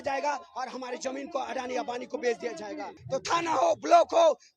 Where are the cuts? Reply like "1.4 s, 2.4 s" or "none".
2.9 s